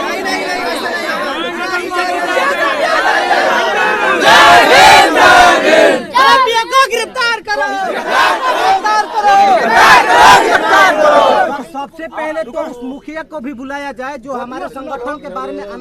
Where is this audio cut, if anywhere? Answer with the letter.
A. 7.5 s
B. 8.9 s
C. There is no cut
B